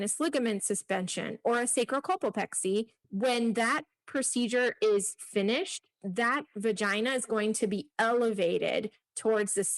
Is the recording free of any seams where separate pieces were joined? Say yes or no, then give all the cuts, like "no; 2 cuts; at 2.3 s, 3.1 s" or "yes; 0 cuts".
no; 1 cut; at 3.0 s